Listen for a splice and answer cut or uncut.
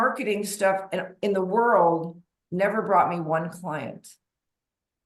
uncut